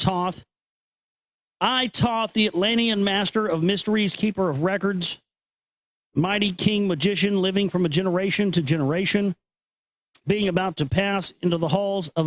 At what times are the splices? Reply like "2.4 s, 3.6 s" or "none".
none